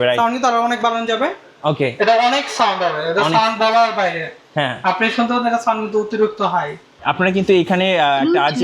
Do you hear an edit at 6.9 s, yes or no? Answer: yes